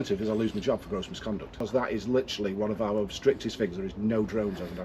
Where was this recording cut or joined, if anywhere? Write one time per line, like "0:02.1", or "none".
0:01.6